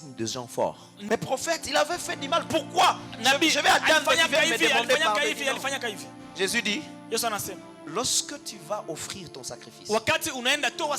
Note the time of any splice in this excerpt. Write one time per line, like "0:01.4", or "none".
0:01.0